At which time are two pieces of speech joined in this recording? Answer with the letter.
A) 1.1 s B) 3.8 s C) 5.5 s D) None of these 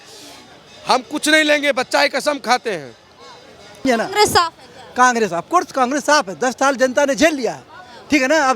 B